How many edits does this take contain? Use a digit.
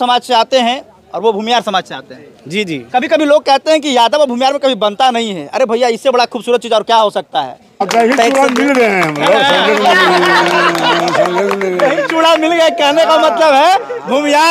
1